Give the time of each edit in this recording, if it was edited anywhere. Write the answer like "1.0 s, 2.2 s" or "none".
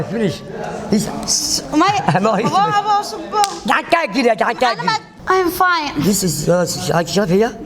5.1 s